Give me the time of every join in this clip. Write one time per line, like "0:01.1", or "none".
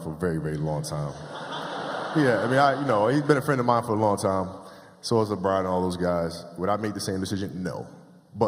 none